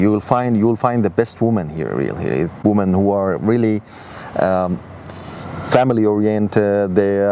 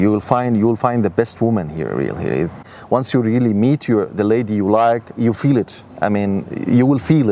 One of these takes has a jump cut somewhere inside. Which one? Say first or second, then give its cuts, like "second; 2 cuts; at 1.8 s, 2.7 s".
second; 1 cut; at 2.6 s